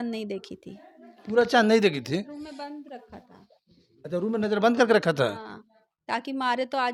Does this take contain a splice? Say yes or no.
no